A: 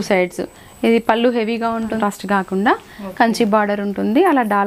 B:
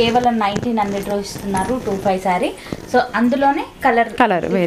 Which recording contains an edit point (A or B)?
A